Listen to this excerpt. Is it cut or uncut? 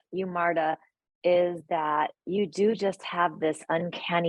uncut